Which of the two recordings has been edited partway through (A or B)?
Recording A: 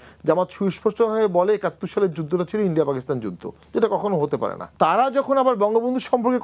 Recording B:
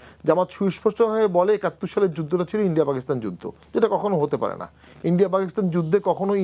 A